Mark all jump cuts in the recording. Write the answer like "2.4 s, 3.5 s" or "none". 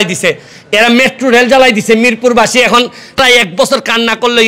3.2 s